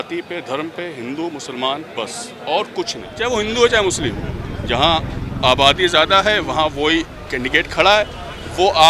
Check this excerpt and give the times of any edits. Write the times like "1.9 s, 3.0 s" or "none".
3.0 s